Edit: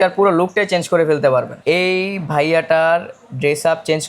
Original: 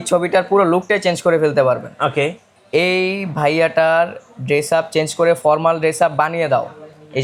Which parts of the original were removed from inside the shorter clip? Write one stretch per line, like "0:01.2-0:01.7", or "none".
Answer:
0:01.9-0:02.6

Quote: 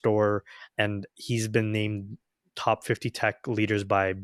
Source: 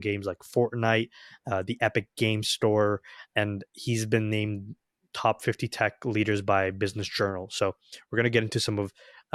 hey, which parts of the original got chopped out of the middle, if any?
none

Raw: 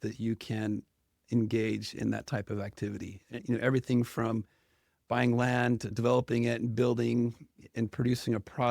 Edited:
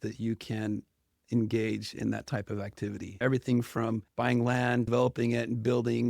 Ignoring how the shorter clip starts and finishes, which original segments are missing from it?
0:03.2-0:03.6
0:04.5-0:05.0
0:05.8-0:06.0

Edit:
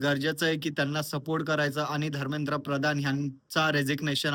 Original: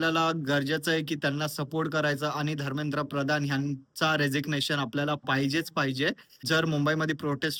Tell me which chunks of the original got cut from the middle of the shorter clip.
none

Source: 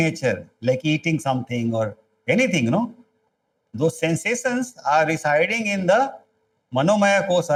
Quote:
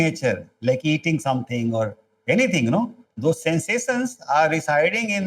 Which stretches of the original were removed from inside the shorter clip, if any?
0:03.0-0:03.6

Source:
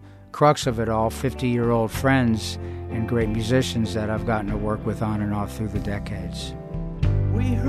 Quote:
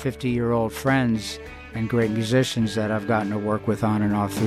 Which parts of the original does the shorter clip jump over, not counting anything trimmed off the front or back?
none

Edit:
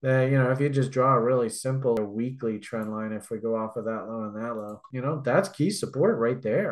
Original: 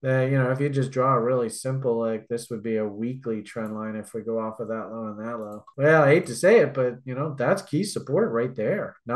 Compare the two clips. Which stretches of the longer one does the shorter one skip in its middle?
0:02.0-0:02.8
0:05.7-0:07.0

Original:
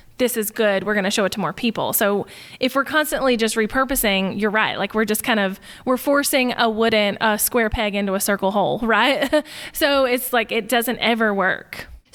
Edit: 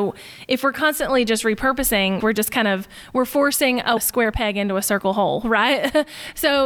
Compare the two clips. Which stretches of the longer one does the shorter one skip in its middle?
0:04.3-0:04.9
0:06.7-0:07.4

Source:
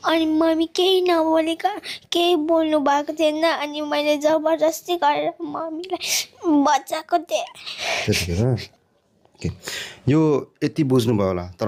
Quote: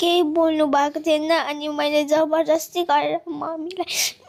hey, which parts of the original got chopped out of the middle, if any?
none

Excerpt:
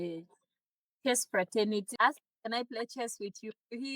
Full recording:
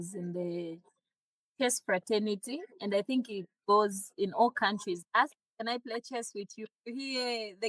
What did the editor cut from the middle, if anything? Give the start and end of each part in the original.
0:02.4-0:05.0

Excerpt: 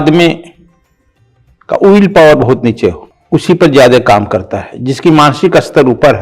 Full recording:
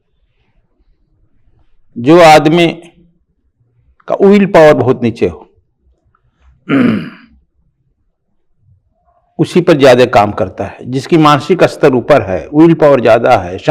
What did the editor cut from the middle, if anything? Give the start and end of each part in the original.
0:05.5-0:09.2

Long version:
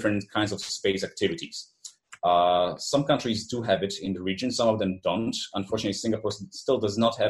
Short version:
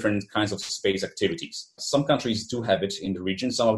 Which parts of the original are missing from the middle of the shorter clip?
0:01.8-0:02.8

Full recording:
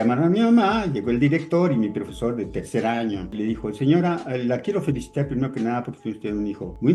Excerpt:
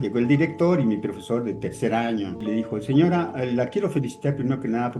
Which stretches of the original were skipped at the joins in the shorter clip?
none

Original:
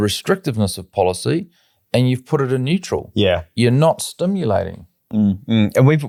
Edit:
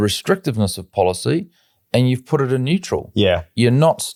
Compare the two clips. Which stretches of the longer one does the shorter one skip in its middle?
none

